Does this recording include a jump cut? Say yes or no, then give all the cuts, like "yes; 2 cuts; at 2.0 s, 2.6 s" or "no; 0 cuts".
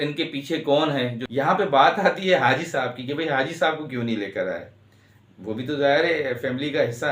yes; 1 cut; at 1.2 s